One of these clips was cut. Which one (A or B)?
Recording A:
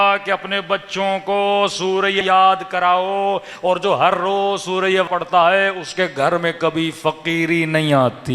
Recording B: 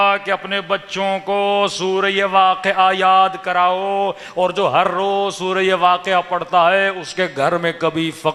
A